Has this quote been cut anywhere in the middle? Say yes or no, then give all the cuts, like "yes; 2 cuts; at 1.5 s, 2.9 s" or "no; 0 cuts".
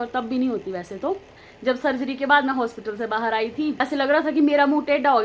yes; 2 cuts; at 1.4 s, 3.8 s